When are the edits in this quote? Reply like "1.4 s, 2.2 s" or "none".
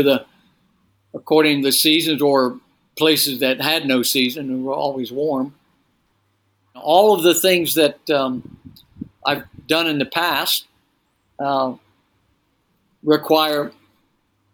6.8 s